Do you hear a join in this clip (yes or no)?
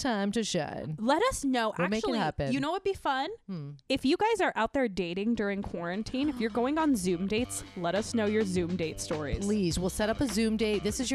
no